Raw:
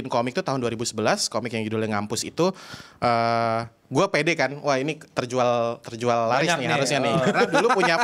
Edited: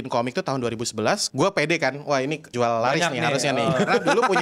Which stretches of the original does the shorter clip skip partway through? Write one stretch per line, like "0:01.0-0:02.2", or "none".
0:01.2-0:03.8
0:05.0-0:05.9

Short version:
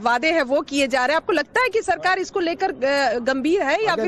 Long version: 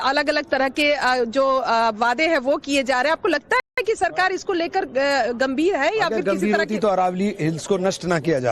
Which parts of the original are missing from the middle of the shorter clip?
0:03.6-0:03.8

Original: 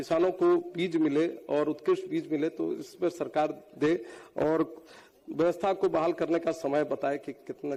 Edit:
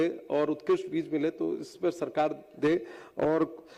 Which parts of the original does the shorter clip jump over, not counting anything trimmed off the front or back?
none

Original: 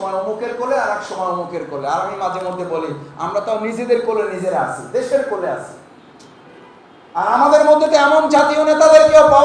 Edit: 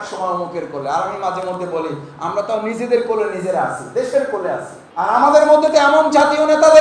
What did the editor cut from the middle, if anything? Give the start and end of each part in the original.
0:05.8-0:07.0

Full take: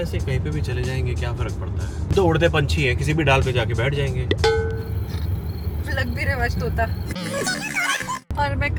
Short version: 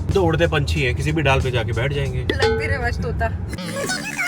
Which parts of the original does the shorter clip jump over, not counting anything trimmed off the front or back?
0:04.7-0:06.3

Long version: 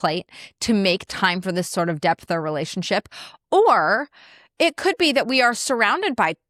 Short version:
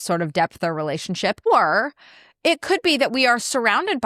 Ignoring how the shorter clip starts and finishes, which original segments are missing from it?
0:03.1-0:03.6

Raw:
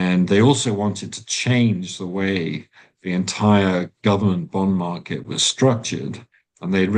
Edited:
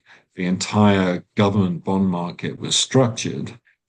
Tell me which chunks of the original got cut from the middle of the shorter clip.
none

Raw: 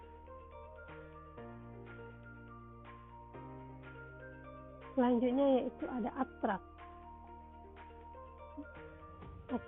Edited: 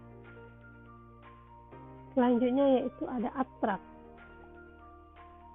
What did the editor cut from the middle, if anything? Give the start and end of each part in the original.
0:03.8-0:04.9

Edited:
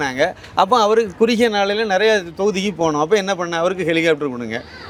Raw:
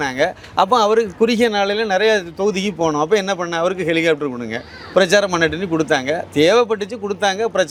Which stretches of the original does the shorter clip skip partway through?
none

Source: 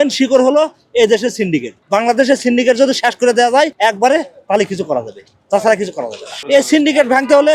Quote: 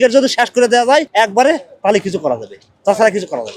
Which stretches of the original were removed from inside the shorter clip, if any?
none

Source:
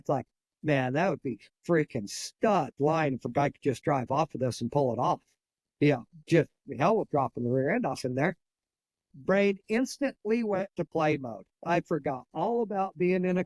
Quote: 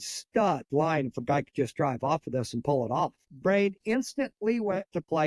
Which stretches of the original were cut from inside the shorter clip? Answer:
0:05.3-0:09.1

